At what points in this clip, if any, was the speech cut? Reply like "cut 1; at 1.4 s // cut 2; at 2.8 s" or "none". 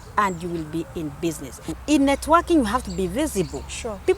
cut 1; at 1.7 s